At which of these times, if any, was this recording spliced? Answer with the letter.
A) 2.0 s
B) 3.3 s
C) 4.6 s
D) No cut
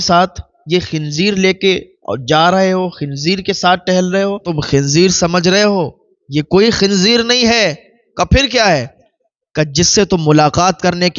C